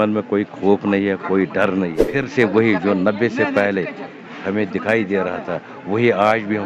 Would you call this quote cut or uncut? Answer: cut